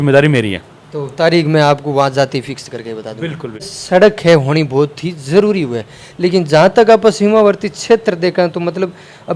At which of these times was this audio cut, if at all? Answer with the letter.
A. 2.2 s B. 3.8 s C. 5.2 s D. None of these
B